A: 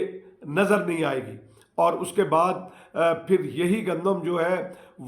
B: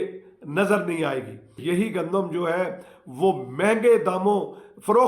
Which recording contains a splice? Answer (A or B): B